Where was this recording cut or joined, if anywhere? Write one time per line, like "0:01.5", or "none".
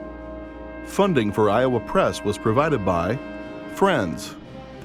0:00.9